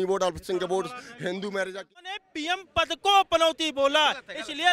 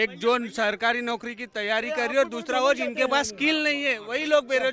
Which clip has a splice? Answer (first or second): first